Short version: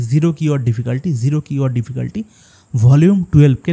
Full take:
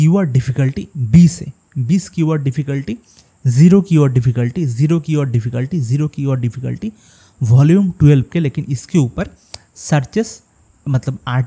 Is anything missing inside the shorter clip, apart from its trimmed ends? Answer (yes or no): no